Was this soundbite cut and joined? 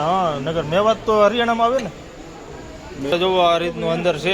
yes; 1 cut; at 3.1 s

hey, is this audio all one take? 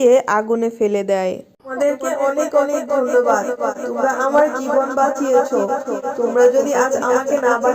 no; 1 cut; at 1.6 s

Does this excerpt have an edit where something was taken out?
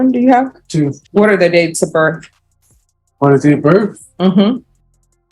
yes; 1 cut; at 1.0 s

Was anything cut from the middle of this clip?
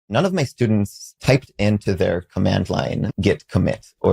yes; 2 cuts; at 1.1 s, 3.1 s

